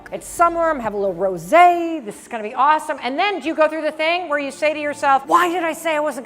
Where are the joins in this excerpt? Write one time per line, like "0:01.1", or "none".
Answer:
0:05.2